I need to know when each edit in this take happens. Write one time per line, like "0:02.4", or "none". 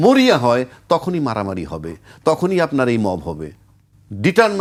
none